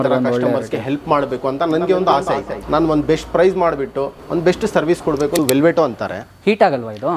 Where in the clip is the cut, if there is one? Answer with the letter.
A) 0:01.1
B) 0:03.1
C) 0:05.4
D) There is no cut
C